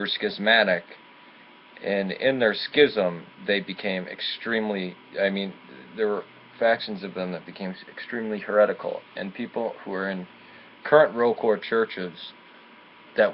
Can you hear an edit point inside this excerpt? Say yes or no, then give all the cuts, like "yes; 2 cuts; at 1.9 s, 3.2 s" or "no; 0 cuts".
yes; 1 cut; at 7.9 s